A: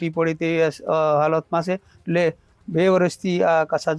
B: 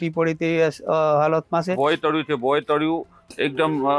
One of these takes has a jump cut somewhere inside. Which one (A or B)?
B